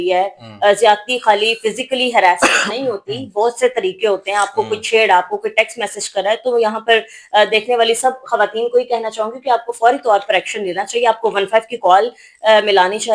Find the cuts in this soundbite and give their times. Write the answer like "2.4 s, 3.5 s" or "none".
none